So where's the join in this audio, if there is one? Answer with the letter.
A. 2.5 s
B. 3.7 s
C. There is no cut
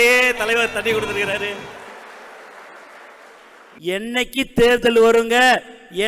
B